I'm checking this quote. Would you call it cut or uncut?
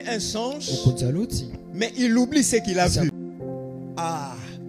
cut